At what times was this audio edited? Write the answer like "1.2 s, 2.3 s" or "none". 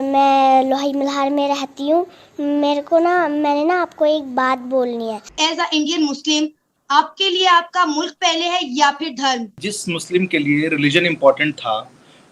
5.3 s, 9.7 s